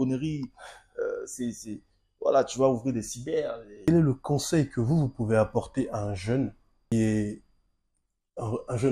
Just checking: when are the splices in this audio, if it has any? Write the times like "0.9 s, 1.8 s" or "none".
3.8 s, 6.9 s